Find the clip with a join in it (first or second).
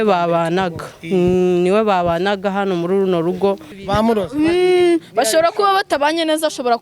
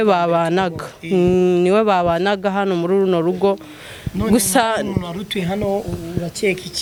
first